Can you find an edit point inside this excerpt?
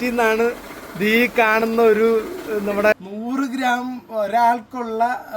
yes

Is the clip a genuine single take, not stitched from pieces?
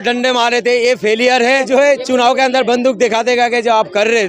no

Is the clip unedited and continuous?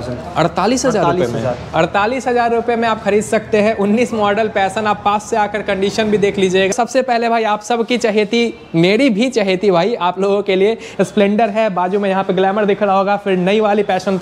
no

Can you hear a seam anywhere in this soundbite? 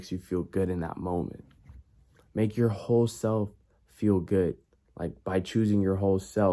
no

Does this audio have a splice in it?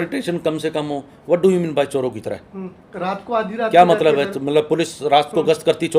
no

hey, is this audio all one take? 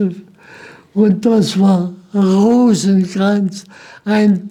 yes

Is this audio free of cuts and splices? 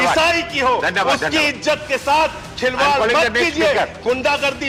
yes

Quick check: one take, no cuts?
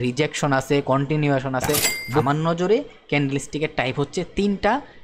no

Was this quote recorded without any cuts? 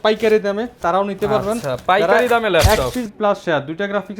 no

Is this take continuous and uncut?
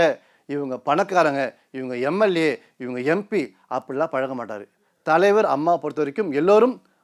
yes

